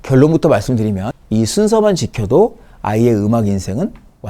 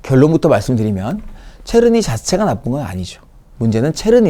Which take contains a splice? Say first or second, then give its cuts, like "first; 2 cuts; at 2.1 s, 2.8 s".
first; 1 cut; at 1.1 s